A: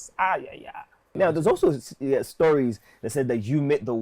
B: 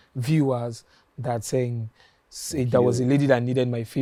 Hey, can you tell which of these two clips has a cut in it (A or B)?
A